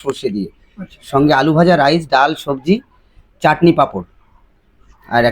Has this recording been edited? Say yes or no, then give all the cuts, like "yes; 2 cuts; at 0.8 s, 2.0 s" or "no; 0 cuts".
no; 0 cuts